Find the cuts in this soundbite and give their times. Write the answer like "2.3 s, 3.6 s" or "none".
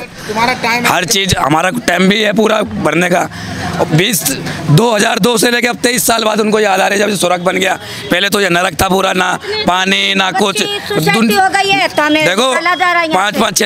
none

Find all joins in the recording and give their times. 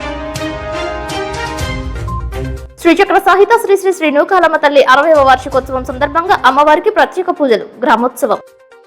none

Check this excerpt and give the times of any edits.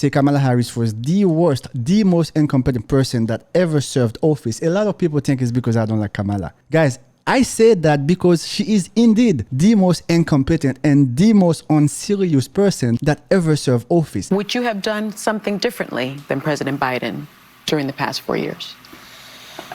6.5 s, 9.5 s, 13.0 s, 14.2 s

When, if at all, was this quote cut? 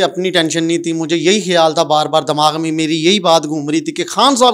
none

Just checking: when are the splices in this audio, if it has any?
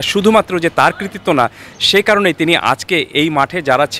none

